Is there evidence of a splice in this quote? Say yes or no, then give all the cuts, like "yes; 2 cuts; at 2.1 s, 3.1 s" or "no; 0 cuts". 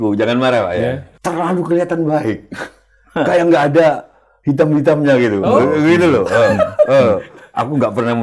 yes; 1 cut; at 1.1 s